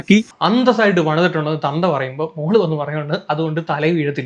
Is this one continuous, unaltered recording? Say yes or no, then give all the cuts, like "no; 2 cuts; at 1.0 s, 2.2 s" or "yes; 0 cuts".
yes; 0 cuts